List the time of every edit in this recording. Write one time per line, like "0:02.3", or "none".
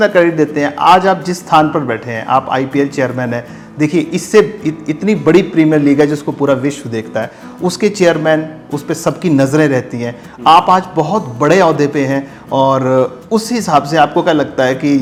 none